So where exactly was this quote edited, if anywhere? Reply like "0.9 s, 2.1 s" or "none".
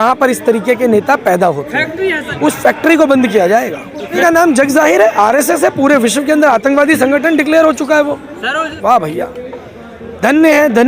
2.2 s, 4.2 s, 8.7 s